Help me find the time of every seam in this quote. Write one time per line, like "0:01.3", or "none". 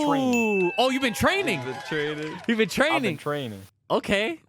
none